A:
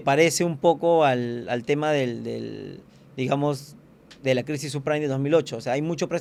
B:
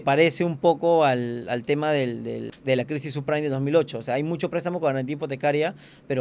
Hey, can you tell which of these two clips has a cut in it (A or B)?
B